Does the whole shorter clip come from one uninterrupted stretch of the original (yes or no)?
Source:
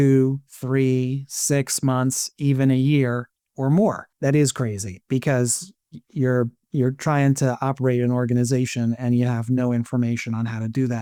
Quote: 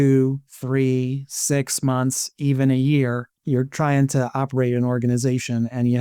no